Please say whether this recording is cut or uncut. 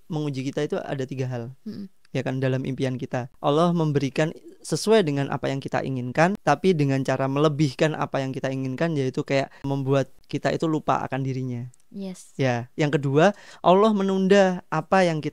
cut